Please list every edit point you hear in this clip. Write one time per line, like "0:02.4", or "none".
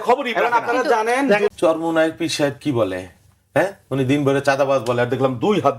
0:01.5